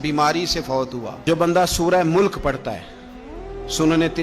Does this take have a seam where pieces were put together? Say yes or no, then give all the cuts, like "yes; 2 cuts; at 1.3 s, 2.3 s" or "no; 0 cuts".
yes; 1 cut; at 1.2 s